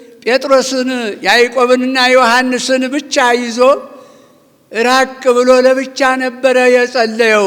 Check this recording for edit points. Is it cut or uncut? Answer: uncut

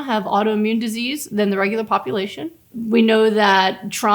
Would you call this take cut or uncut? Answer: cut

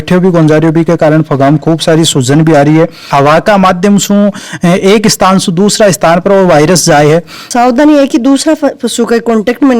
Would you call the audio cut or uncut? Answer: cut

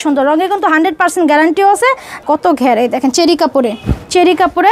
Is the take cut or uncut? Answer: cut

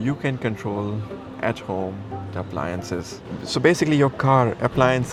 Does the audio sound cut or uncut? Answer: uncut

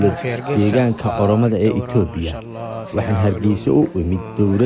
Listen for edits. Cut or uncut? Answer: uncut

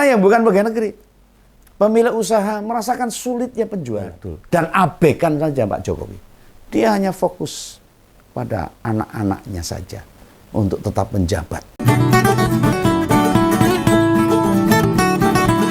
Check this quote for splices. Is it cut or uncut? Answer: cut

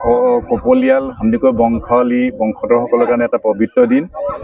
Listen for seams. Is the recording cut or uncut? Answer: uncut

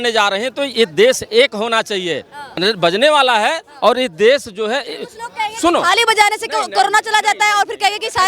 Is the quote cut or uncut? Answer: uncut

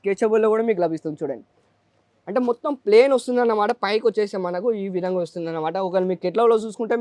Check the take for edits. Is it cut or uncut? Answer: uncut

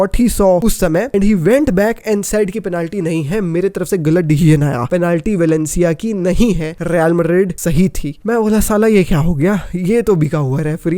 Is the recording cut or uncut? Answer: cut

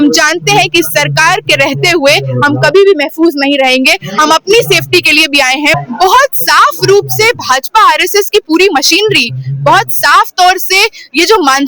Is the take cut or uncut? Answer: cut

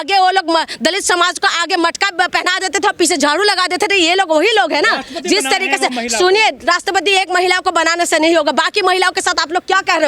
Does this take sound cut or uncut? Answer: uncut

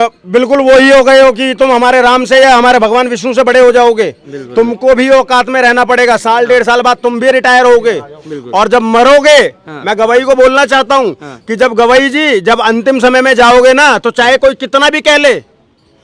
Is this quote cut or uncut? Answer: uncut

